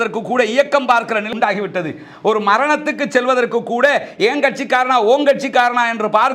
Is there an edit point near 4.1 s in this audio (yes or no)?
no